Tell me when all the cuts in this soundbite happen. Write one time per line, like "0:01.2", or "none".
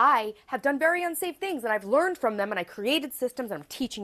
none